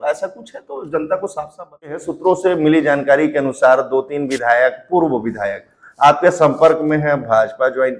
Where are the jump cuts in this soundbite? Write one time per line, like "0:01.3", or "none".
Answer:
0:02.1